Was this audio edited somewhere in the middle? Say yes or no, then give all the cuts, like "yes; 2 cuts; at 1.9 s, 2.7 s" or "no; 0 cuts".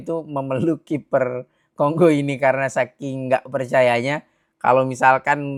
no; 0 cuts